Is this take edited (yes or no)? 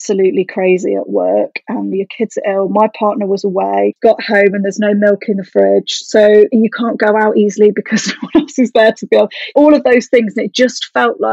no